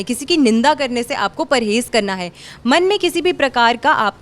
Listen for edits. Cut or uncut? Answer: uncut